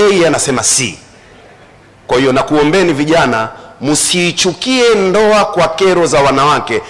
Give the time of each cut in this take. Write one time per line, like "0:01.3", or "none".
none